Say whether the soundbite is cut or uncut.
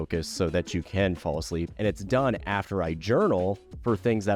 cut